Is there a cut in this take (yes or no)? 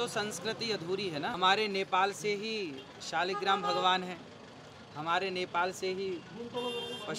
yes